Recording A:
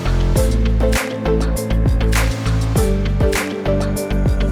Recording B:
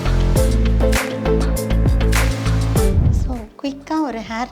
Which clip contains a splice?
B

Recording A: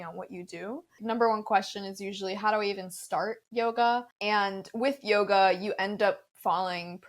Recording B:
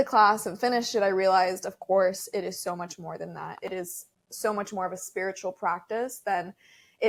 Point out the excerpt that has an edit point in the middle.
A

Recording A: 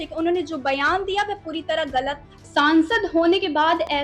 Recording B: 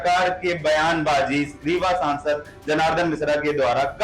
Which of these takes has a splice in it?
A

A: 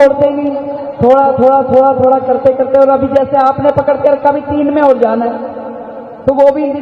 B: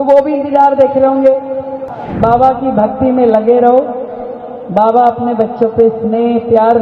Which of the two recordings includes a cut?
B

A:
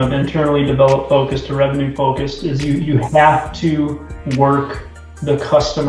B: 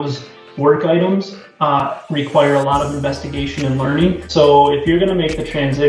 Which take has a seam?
B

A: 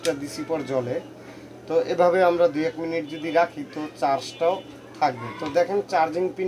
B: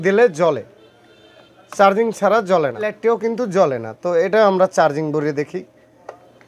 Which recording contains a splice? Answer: B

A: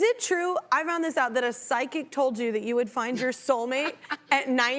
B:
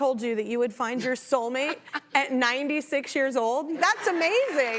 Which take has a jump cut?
B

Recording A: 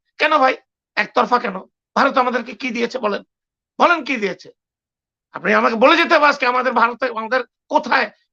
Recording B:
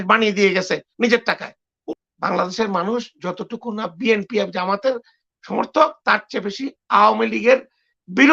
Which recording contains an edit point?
B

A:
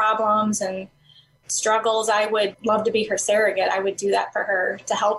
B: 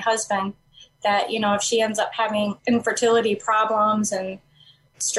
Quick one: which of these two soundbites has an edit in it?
B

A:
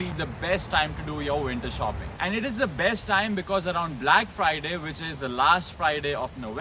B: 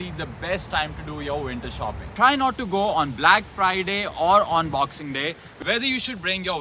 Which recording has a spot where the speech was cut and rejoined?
B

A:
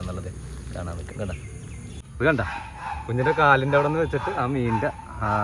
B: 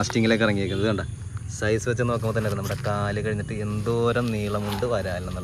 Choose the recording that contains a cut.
A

